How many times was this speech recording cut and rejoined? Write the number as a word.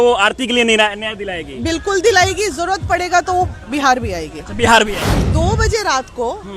one